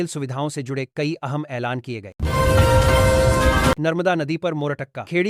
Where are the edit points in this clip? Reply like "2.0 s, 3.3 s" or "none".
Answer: 2.0 s, 3.8 s